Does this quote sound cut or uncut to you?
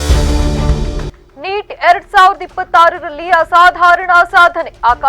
cut